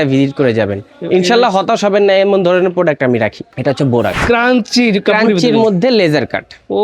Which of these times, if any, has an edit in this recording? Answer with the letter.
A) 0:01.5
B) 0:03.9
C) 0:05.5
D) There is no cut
B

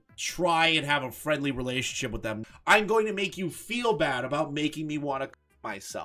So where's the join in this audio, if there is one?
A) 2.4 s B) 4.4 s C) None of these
A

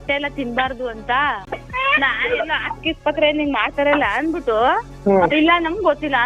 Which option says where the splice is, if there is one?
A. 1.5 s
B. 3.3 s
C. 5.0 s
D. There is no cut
A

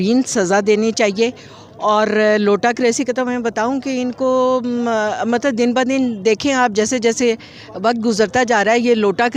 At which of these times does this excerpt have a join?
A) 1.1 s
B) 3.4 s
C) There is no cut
C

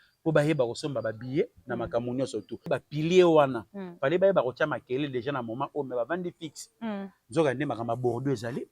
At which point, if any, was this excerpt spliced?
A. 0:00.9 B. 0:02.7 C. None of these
B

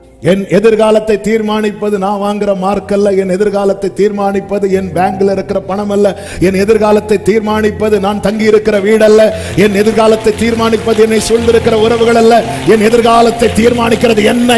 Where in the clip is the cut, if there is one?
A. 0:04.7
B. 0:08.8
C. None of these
C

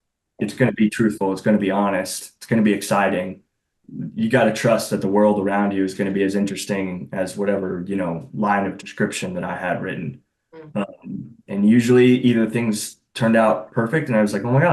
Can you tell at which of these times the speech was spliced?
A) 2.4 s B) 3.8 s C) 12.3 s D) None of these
B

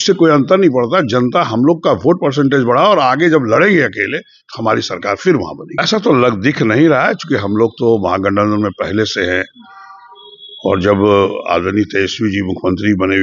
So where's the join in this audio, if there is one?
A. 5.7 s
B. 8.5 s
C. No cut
A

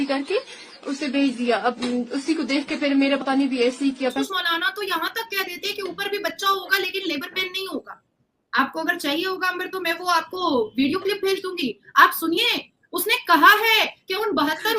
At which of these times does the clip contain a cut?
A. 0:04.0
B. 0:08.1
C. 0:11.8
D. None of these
A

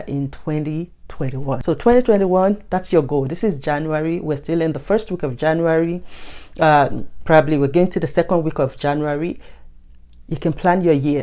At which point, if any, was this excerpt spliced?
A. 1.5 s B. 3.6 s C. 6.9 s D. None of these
A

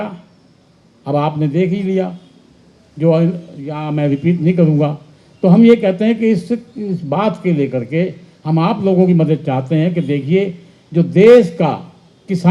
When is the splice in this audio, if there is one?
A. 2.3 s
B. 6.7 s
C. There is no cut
C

